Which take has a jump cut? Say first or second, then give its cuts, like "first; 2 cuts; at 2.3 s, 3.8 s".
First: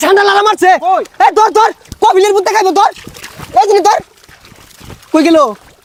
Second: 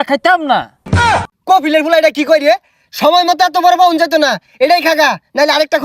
second; 1 cut; at 1.0 s